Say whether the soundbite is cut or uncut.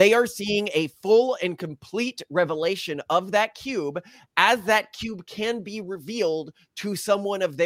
uncut